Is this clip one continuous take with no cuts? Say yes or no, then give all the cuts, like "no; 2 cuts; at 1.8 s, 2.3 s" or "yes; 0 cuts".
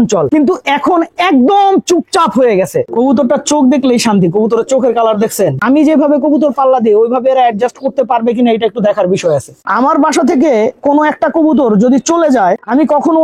no; 3 cuts; at 2.9 s, 5.6 s, 9.6 s